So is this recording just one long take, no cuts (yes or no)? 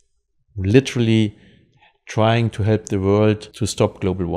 no